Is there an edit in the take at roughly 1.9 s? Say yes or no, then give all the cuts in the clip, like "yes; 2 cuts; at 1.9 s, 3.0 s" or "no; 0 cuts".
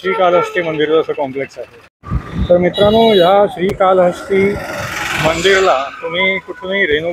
no; 0 cuts